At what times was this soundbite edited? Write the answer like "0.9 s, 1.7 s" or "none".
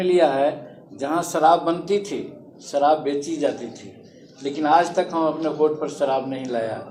none